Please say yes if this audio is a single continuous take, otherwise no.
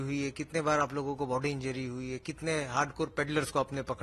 yes